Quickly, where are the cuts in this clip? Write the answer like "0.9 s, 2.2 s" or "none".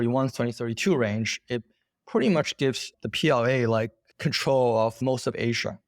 5.0 s